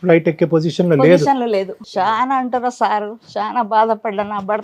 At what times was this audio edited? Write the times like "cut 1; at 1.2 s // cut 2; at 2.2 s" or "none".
cut 1; at 1.8 s